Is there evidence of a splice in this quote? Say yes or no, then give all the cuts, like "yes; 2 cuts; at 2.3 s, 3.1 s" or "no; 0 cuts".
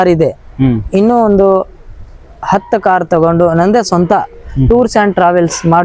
no; 0 cuts